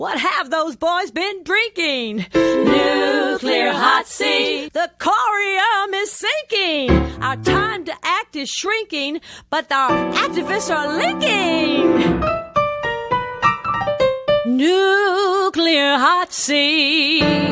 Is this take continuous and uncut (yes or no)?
yes